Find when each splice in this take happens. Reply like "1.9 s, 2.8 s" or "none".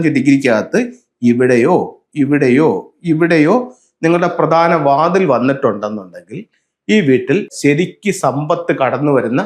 7.5 s

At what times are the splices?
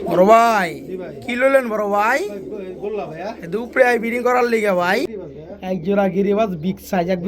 5.2 s

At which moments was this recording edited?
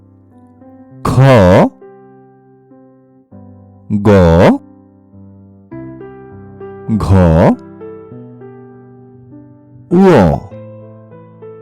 1.7 s, 3.8 s, 4.6 s, 6.7 s, 7.6 s, 9.5 s, 10.5 s

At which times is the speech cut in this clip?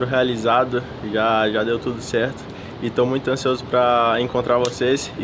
none

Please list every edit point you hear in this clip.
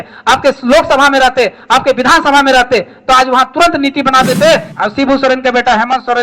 4.7 s

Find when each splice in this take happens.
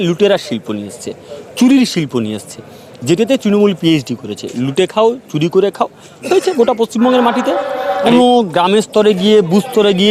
8.0 s

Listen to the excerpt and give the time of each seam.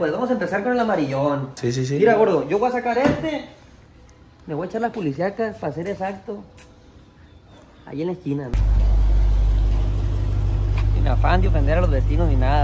1.6 s, 8.5 s

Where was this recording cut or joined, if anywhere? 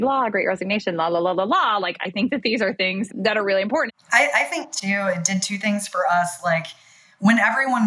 3.1 s, 3.9 s

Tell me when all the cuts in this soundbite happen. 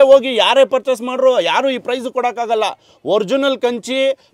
none

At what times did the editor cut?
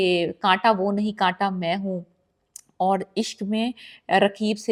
none

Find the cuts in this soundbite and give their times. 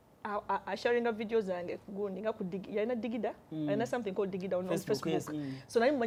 none

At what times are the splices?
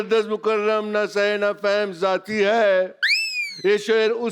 none

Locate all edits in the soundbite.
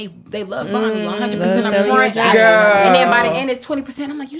none

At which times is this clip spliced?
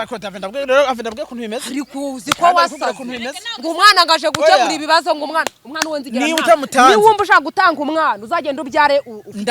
5.8 s

